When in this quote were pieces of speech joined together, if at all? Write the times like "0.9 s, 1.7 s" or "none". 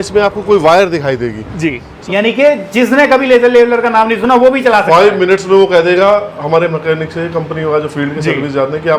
1.9 s